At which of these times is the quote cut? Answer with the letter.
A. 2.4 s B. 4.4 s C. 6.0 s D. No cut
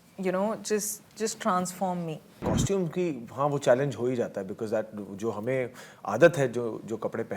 A